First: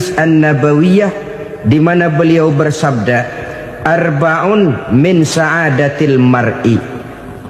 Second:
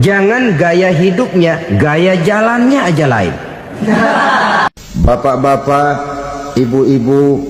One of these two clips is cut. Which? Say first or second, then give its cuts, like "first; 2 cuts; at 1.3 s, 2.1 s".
second; 1 cut; at 4.7 s